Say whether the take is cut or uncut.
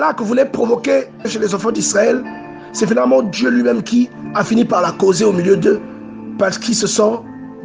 uncut